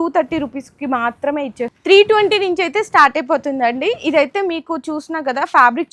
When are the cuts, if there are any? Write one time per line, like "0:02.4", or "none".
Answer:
0:01.8